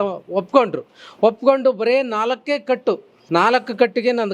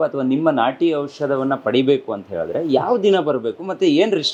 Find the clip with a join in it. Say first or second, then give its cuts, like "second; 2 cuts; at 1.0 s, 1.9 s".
first; 1 cut; at 3.1 s